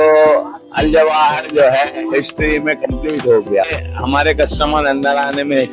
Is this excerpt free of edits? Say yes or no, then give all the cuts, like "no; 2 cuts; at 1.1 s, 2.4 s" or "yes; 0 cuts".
no; 1 cut; at 3.7 s